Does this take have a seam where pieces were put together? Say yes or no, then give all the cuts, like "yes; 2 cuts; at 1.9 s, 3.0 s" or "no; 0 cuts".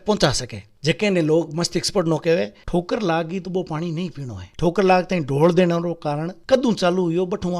yes; 2 cuts; at 2.6 s, 4.5 s